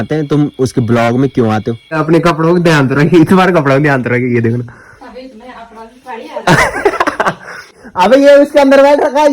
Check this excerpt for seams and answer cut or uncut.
cut